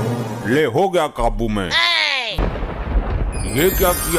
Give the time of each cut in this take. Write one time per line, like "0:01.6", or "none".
0:02.4

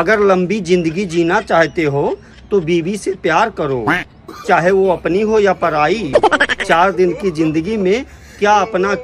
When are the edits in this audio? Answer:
none

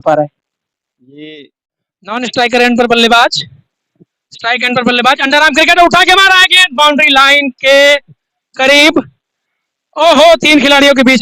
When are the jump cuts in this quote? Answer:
0:02.1

